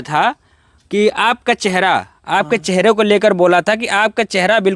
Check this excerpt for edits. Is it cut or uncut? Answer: uncut